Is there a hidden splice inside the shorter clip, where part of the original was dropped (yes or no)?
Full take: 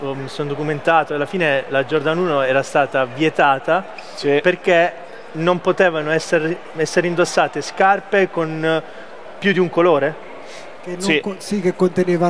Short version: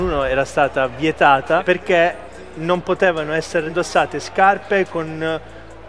yes